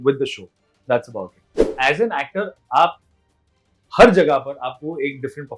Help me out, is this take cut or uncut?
cut